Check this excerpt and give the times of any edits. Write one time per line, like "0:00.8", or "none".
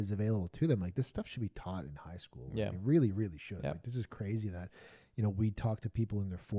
none